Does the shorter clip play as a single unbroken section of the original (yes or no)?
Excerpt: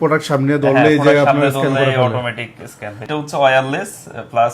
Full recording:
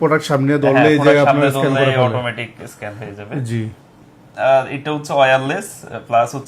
no